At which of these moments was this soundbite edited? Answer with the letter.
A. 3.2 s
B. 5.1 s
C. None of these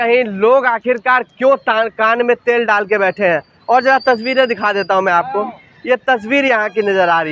C